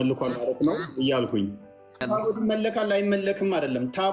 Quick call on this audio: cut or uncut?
cut